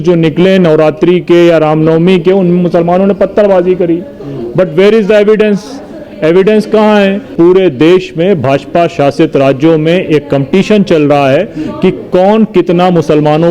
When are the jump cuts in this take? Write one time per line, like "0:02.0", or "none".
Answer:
0:07.3